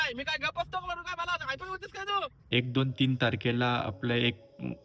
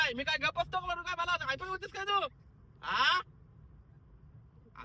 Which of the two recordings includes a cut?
first; 1 cut; at 2.5 s

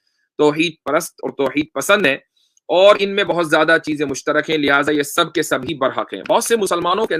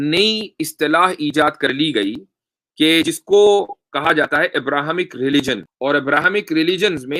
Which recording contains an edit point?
second; 1 cut; at 5.7 s

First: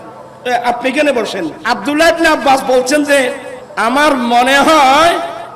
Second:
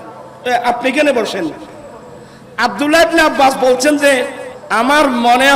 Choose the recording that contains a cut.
first; 1 cut; at 1.6 s

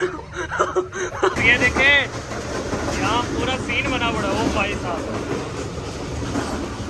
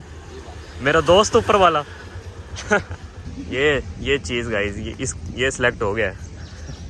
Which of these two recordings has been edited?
first; 1 cut; at 1.4 s

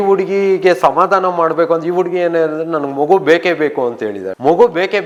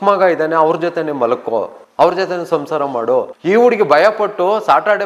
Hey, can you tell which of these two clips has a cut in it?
second; 2 cuts; at 1.8 s, 3.3 s

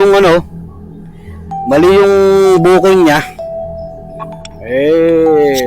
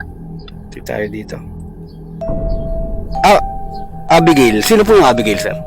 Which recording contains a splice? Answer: first; 2 cuts; at 3.2 s, 4.7 s

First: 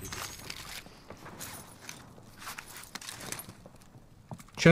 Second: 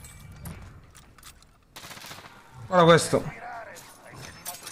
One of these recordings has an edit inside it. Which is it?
second; 1 cut; at 1.8 s

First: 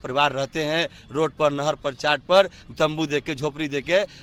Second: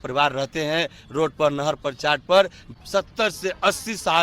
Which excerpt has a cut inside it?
second; 1 cut; at 2.7 s

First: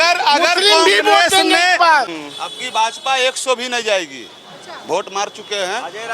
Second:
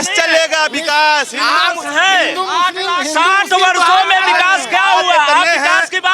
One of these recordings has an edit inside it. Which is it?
first; 1 cut; at 2.1 s

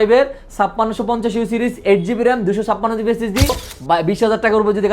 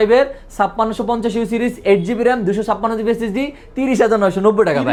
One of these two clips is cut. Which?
first; 1 cut; at 3.6 s

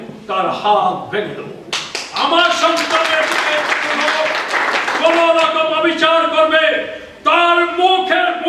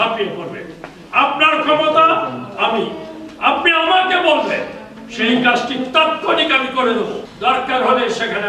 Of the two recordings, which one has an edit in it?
second; 1 cut; at 7.3 s

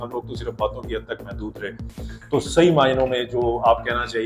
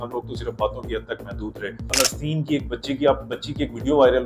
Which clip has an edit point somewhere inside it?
second; 1 cut; at 1.9 s

